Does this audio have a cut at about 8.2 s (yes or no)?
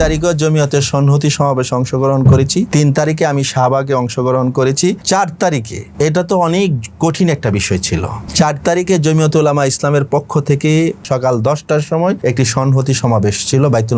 yes